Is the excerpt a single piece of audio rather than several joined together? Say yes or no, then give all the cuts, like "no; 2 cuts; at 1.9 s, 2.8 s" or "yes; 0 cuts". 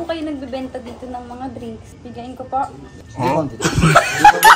no; 2 cuts; at 1.9 s, 3.4 s